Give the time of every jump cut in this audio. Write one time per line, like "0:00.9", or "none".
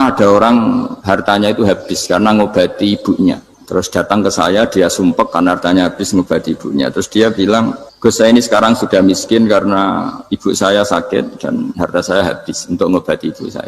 0:00.9
0:03.5
0:07.8